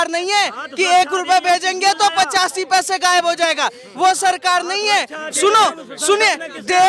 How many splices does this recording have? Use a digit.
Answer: 0